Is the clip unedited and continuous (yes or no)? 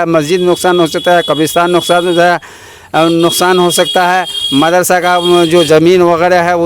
yes